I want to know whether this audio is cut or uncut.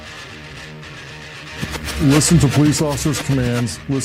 cut